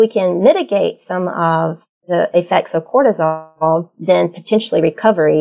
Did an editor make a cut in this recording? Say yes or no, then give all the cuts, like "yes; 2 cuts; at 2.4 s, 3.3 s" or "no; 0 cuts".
no; 0 cuts